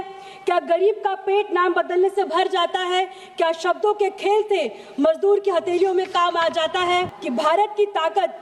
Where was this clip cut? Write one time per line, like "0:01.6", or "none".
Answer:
0:07.1